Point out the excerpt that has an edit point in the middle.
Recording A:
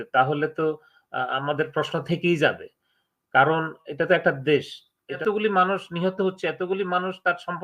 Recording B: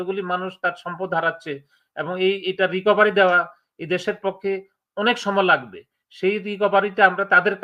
A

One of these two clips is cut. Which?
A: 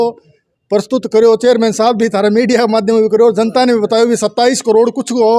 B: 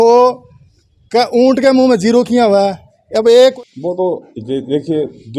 B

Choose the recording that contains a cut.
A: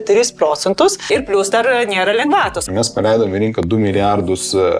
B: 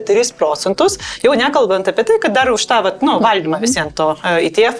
A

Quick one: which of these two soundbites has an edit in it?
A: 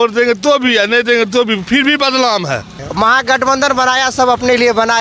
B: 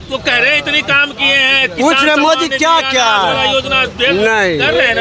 A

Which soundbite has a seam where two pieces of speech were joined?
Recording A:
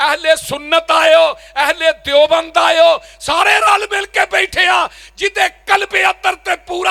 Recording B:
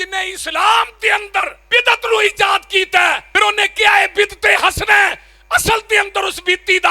B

